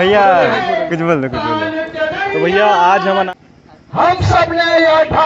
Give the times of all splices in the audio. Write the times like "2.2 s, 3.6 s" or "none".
3.3 s